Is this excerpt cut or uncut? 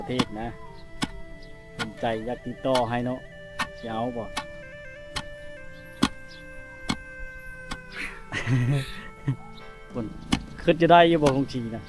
cut